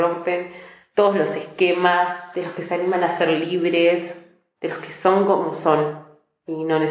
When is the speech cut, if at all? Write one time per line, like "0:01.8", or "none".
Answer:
none